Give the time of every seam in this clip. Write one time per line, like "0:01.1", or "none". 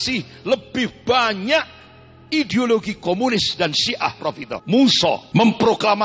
0:04.5
0:05.2